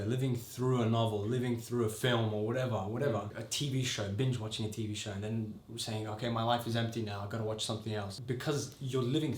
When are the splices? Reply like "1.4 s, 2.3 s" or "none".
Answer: 3.4 s, 8.1 s